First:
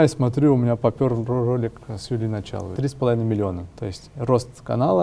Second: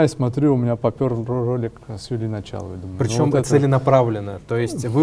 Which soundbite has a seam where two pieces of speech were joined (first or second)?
first